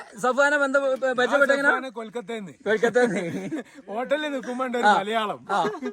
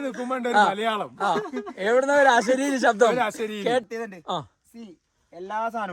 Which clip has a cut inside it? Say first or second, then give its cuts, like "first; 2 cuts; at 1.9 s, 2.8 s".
second; 1 cut; at 3.8 s